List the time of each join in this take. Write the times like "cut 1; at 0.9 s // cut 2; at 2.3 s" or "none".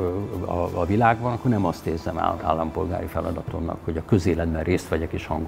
none